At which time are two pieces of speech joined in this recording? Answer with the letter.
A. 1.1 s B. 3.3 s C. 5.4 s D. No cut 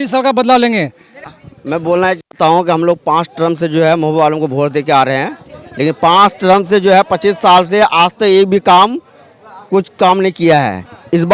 A